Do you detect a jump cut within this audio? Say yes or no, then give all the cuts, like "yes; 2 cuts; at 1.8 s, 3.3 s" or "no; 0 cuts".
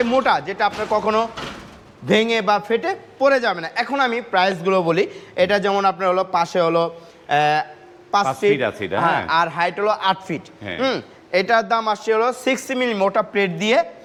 no; 0 cuts